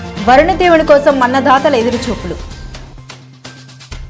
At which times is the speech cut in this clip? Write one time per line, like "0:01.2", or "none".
none

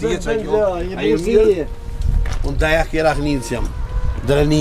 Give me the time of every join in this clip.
none

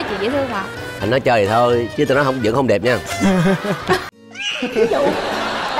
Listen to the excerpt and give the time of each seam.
0:04.0

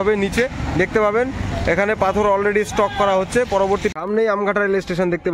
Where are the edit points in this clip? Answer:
0:03.9

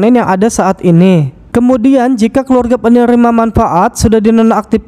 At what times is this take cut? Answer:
0:01.4

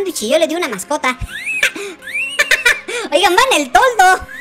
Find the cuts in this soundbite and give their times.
0:02.0

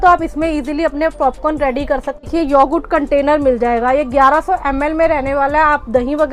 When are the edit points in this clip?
0:02.2

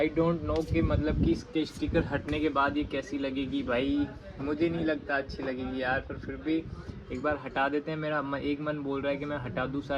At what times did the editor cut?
none

